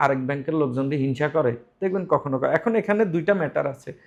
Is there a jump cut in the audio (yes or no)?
no